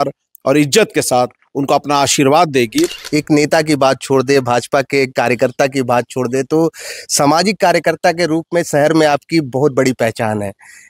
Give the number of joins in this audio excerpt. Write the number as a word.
one